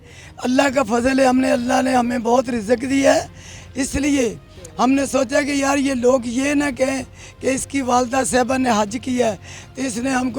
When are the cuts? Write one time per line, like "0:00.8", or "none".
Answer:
none